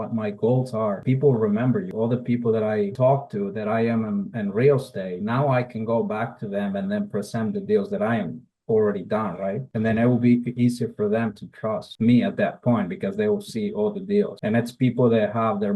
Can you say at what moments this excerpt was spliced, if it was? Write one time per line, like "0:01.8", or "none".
0:01.0
0:01.9
0:02.9